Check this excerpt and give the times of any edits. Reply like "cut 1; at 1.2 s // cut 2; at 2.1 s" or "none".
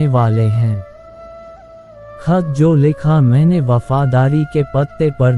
cut 1; at 0.9 s // cut 2; at 2.2 s